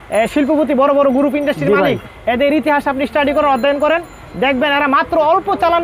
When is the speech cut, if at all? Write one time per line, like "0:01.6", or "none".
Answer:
none